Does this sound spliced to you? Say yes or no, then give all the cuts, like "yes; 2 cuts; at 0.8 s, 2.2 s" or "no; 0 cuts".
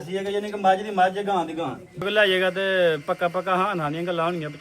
yes; 1 cut; at 2.0 s